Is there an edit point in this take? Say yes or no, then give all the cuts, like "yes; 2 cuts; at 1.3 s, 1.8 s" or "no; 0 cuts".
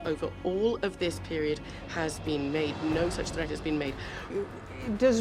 yes; 1 cut; at 4.3 s